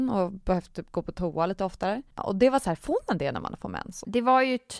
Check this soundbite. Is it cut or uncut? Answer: cut